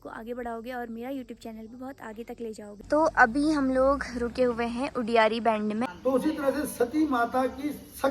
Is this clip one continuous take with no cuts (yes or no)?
no